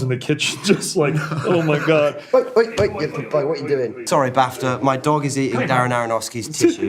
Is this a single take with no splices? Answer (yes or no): no